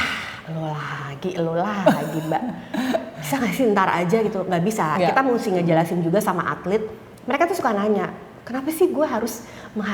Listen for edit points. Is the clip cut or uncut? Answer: uncut